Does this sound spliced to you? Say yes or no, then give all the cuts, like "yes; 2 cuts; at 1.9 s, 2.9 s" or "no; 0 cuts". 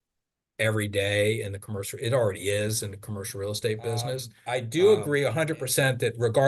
yes; 1 cut; at 4.3 s